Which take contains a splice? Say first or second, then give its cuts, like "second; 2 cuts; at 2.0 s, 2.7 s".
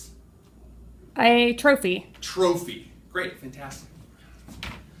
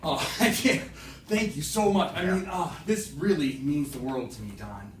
second; 1 cut; at 1.1 s